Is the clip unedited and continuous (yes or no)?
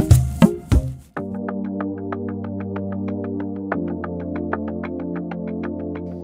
no